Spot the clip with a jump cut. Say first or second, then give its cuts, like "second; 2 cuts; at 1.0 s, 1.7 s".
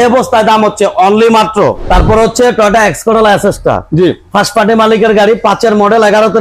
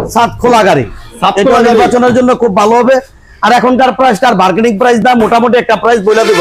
first; 1 cut; at 1.8 s